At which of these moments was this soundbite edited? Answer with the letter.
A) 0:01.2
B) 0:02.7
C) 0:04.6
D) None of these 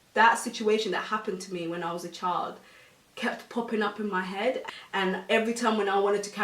C